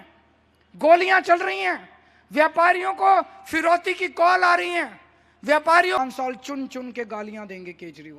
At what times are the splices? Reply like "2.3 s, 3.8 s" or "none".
6.0 s

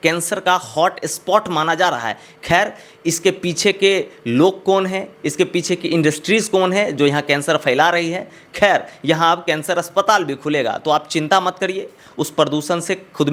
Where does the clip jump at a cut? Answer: none

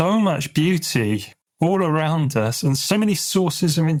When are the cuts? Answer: none

